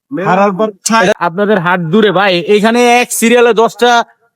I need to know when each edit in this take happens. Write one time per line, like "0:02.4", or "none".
0:01.1

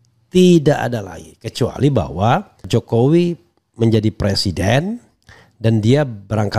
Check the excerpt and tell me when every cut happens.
0:02.7

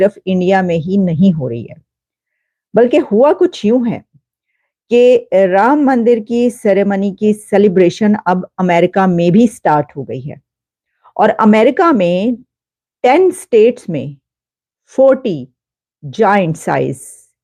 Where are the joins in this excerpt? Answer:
none

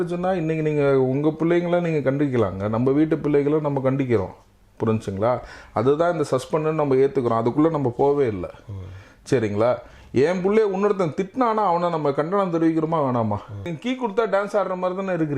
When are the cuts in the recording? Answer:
0:13.7

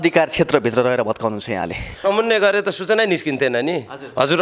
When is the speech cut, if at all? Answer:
0:02.0

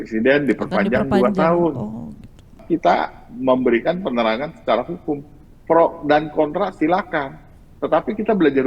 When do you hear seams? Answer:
0:02.6

